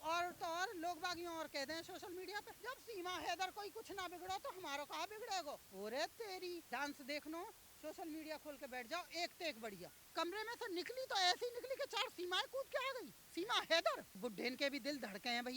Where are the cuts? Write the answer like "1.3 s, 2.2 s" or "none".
2.5 s, 5.7 s, 6.6 s, 10.1 s, 13.2 s, 14.1 s